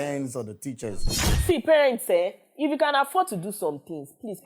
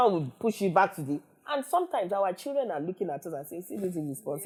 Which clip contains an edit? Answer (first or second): first